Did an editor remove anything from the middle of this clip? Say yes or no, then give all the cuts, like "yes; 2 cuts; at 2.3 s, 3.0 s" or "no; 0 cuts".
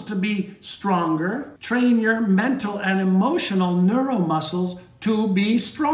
yes; 1 cut; at 1.5 s